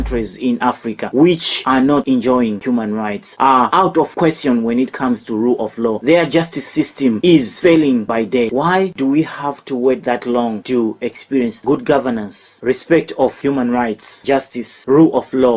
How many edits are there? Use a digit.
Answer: 3